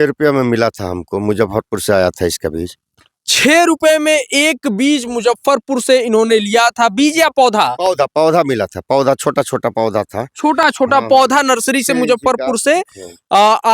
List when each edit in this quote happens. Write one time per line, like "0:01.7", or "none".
none